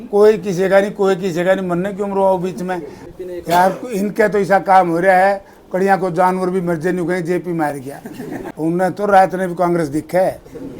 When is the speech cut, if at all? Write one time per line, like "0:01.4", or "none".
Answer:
0:03.0
0:08.5